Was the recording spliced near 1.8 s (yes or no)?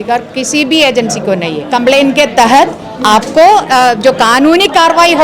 yes